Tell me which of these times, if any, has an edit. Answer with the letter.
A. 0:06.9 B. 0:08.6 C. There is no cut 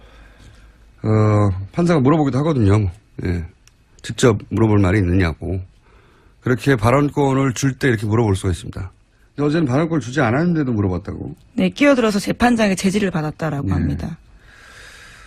A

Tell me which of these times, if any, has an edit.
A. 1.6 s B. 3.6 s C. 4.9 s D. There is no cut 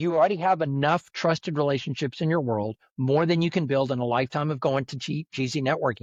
D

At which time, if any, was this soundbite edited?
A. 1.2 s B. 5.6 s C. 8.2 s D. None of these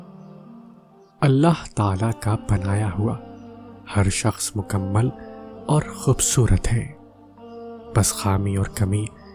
A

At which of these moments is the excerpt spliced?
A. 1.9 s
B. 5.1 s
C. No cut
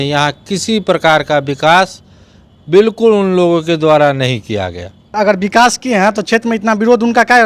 B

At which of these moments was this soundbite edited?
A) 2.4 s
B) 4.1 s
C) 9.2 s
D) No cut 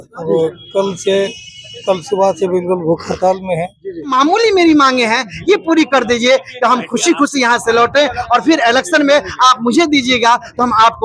B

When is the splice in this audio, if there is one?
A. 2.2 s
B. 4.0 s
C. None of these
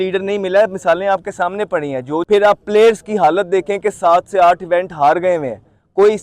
A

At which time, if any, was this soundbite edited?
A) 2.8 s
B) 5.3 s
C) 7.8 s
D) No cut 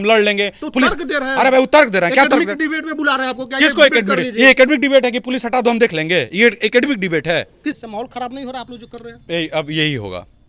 C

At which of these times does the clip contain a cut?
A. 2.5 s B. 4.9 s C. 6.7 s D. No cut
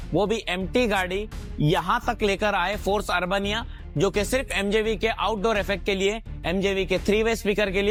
D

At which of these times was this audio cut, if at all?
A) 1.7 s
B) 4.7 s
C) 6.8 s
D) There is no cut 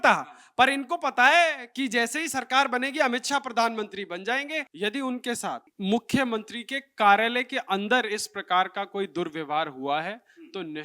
B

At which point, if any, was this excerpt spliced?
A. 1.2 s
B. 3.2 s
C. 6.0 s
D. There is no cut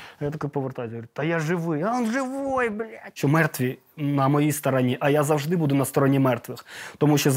B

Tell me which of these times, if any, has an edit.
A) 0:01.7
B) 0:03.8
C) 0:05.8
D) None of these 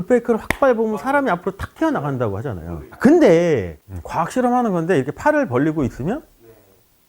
B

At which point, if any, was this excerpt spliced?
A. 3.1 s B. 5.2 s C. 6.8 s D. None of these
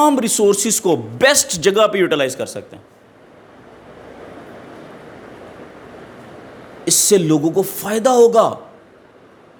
D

